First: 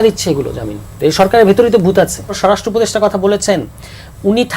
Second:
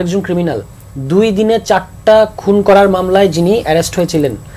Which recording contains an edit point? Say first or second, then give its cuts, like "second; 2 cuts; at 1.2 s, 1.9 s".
first; 1 cut; at 2.4 s